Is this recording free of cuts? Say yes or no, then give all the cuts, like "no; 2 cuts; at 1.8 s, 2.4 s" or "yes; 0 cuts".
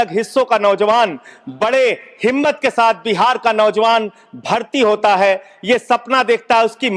yes; 0 cuts